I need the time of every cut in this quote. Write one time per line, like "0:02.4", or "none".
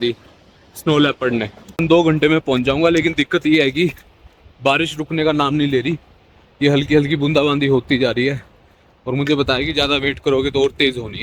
0:01.8